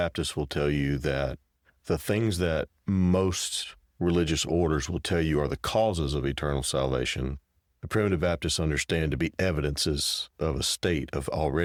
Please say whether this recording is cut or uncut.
uncut